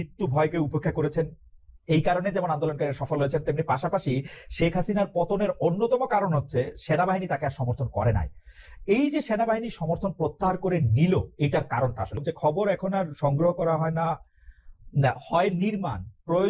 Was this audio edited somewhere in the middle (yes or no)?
yes